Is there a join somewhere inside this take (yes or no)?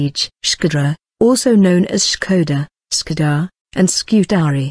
no